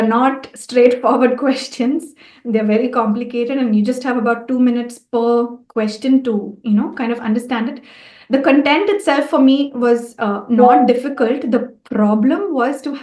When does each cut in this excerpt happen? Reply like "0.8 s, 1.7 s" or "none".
none